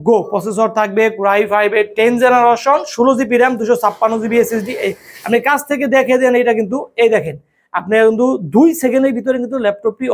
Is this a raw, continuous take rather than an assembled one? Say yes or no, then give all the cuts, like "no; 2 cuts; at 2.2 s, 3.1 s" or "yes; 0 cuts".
yes; 0 cuts